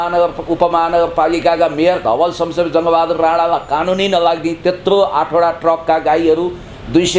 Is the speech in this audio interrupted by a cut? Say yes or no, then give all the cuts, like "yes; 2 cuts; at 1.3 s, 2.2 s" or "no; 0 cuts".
no; 0 cuts